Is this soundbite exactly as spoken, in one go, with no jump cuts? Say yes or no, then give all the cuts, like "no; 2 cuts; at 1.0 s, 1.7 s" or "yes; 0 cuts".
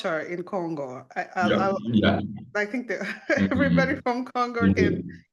yes; 0 cuts